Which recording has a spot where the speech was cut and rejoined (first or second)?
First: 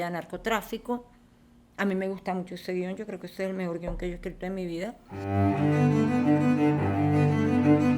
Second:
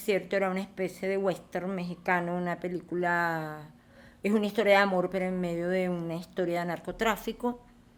first